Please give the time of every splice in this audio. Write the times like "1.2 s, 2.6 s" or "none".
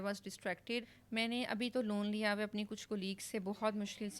1.0 s